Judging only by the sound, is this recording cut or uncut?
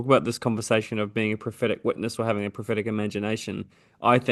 uncut